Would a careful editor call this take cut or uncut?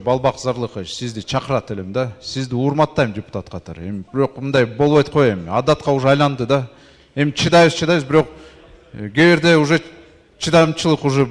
uncut